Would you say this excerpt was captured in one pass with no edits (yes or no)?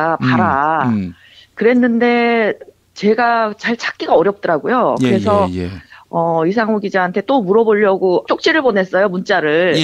no